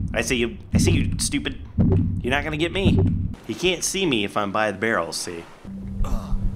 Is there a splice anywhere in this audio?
yes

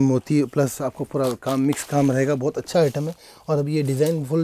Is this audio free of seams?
yes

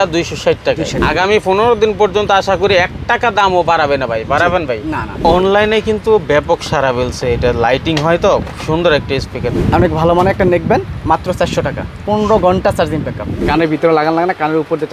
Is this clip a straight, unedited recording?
no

